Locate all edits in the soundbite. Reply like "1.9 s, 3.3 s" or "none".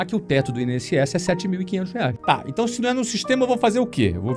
2.2 s